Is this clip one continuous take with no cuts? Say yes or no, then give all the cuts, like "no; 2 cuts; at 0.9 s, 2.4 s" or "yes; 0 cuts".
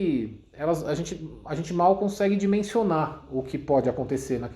yes; 0 cuts